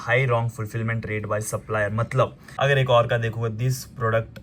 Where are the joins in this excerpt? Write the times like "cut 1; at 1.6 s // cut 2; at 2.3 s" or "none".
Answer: cut 1; at 2.6 s

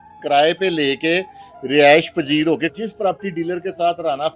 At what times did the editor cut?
cut 1; at 2.8 s

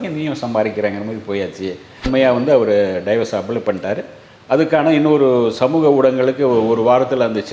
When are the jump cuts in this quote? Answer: cut 1; at 2.0 s

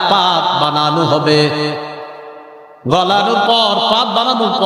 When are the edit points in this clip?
none

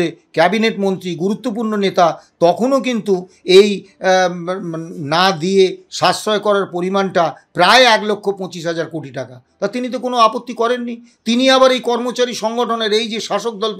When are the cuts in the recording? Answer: none

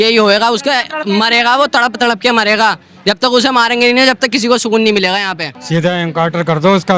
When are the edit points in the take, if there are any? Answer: cut 1; at 5.6 s

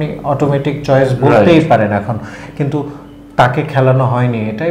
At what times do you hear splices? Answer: none

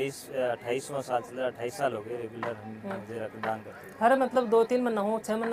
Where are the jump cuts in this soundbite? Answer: none

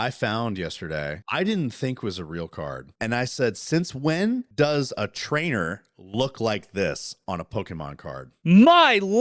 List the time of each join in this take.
cut 1; at 1.2 s // cut 2; at 2.8 s // cut 3; at 4.5 s // cut 4; at 8.3 s

